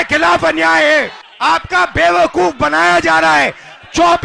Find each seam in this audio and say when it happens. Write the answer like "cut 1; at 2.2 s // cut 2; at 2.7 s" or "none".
cut 1; at 1.2 s